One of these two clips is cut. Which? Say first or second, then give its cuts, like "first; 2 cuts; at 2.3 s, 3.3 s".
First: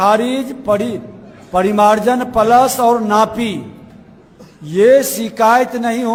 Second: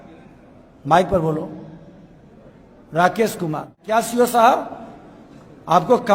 second; 1 cut; at 3.8 s